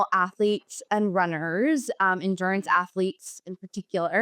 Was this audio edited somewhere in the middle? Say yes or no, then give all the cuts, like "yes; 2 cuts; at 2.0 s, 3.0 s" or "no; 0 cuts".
no; 0 cuts